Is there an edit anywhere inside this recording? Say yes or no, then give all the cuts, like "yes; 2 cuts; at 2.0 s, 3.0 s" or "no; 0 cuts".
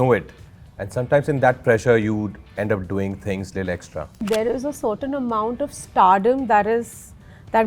yes; 1 cut; at 4.2 s